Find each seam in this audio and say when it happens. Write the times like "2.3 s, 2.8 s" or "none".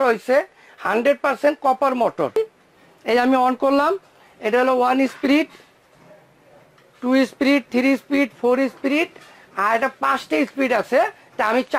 2.4 s